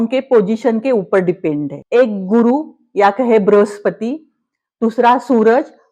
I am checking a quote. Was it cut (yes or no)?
yes